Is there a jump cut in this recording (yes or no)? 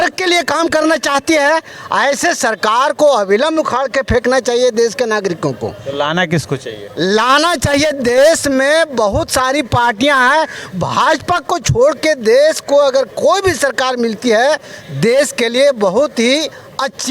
no